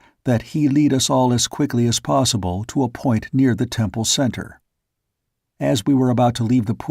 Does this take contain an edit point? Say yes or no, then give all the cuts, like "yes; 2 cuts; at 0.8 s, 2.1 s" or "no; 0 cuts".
yes; 1 cut; at 2.6 s